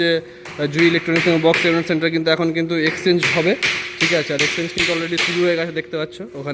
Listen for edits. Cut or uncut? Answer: uncut